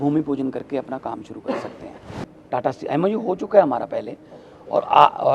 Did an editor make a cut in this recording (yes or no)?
yes